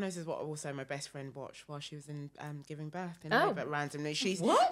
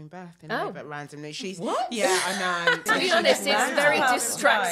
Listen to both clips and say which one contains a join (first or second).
second